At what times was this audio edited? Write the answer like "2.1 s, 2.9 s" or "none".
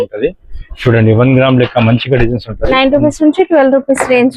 none

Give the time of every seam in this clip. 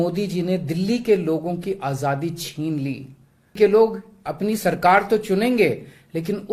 3.5 s

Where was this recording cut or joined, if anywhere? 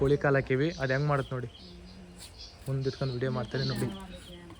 none

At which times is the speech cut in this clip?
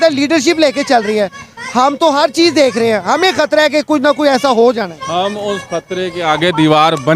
none

